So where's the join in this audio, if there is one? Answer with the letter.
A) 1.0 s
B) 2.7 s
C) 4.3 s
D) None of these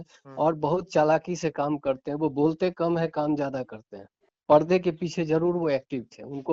C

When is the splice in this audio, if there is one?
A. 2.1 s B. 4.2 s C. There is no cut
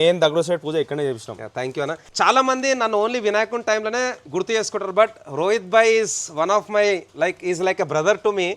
A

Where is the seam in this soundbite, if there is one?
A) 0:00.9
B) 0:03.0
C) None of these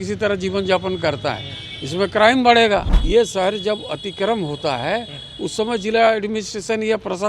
B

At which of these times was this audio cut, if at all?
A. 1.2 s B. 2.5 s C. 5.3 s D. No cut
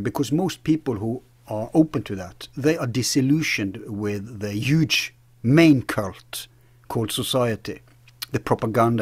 D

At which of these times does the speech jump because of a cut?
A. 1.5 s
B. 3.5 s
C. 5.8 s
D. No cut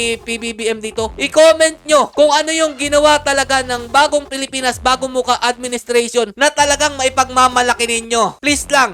D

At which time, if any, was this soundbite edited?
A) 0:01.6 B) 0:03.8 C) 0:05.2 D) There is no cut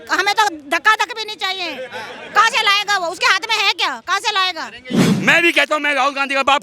C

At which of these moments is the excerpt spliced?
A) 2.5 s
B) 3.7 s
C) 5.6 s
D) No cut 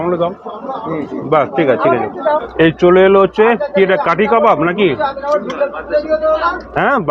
A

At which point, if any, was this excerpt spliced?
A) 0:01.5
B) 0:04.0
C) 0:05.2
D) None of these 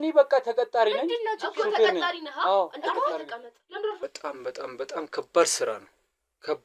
B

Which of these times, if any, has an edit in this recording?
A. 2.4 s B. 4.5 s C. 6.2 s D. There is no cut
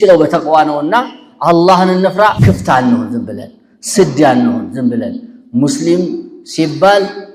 A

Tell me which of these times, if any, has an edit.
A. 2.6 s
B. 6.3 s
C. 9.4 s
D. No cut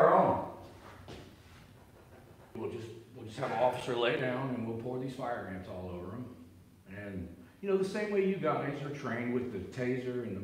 A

